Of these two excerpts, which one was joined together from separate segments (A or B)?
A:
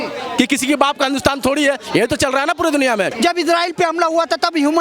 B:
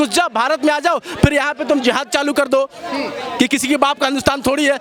A